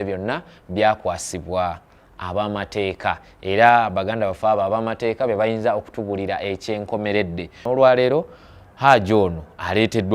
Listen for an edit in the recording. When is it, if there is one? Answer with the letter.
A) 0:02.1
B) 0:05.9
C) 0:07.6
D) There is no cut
C